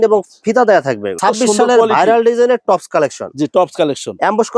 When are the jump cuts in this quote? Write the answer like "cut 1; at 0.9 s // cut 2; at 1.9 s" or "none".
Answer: cut 1; at 1.2 s